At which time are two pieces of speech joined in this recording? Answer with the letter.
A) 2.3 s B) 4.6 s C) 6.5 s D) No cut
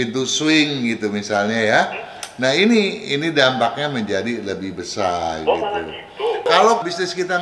C